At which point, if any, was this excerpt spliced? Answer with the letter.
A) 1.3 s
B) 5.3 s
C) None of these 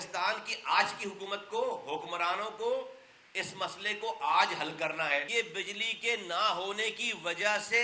B